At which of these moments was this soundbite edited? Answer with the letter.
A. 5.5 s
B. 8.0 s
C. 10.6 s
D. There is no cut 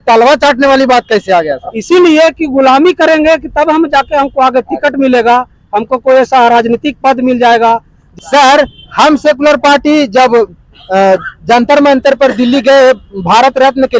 B